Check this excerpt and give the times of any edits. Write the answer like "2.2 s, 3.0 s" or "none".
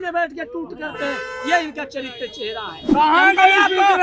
2.7 s